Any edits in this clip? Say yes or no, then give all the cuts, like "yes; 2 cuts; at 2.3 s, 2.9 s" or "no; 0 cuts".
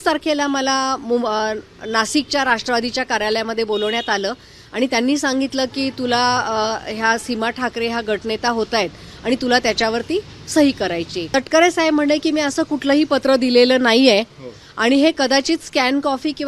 yes; 1 cut; at 11.2 s